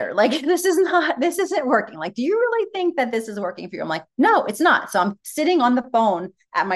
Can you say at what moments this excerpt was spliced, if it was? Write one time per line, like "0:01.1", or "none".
none